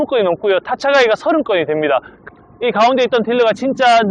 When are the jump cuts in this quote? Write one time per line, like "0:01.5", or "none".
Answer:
0:02.2